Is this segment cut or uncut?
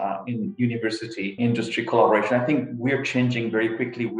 cut